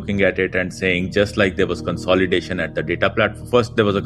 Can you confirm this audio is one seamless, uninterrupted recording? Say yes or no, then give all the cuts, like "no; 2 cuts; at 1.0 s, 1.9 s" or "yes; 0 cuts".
yes; 0 cuts